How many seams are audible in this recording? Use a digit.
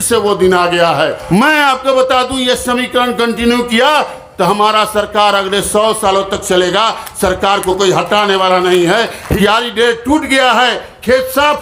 2